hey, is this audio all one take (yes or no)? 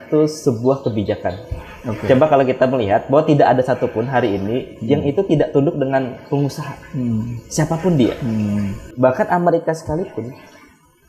no